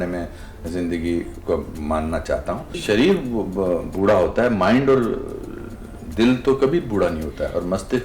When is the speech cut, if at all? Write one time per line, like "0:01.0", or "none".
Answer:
0:02.8